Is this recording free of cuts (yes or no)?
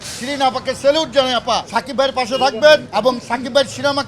no